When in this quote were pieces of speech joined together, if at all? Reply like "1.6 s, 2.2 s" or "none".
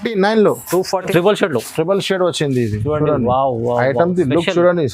1.1 s